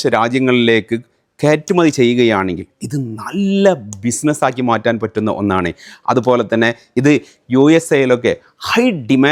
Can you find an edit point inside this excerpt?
no; 0 cuts

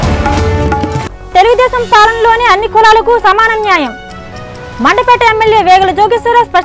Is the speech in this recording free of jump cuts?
yes; 0 cuts

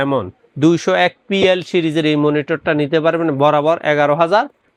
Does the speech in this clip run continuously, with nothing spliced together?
yes; 0 cuts

